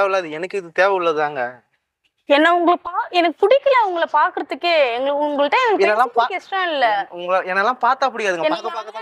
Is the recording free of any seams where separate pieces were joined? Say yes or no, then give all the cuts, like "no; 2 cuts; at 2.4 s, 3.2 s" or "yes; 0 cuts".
yes; 0 cuts